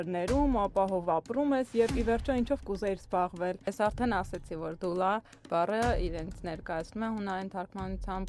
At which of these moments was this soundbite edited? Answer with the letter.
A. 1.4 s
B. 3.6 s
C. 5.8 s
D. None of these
B